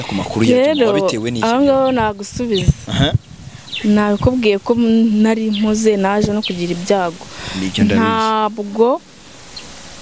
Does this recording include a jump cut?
no; 0 cuts

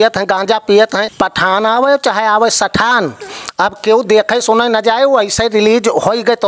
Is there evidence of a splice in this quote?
yes; 1 cut; at 1.1 s

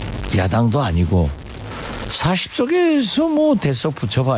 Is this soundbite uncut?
yes; 0 cuts

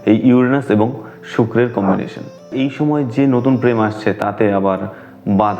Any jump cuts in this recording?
yes; 1 cut; at 2.5 s

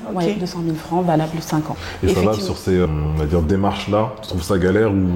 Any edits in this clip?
yes; 2 cuts; at 1.8 s, 2.9 s

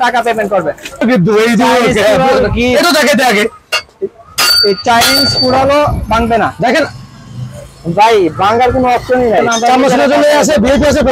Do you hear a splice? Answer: yes; 2 cuts; at 1.0 s, 9.5 s

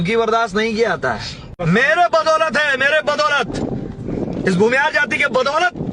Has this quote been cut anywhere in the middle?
yes; 1 cut; at 1.5 s

